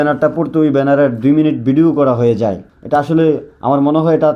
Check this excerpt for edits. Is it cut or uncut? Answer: cut